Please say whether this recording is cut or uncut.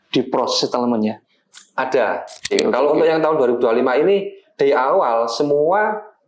cut